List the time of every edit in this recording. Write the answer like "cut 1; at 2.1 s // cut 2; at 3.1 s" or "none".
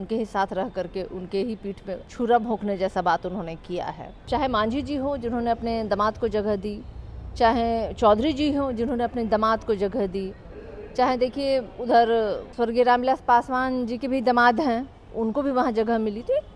cut 1; at 2.1 s // cut 2; at 4.2 s // cut 3; at 12.4 s